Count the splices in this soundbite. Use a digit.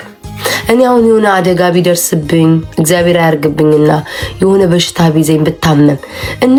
0